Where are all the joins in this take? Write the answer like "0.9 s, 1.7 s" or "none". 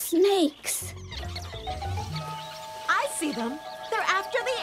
1.1 s